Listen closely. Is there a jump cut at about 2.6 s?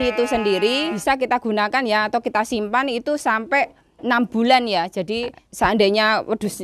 no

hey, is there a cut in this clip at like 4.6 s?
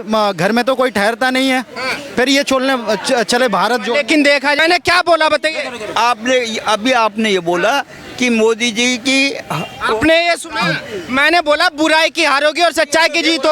yes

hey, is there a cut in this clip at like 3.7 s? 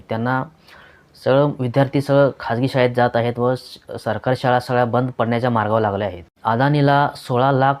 no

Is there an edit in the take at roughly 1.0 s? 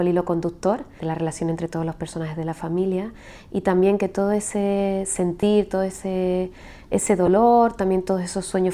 yes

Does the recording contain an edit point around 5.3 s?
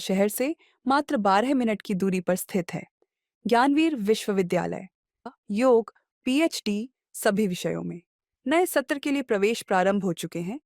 yes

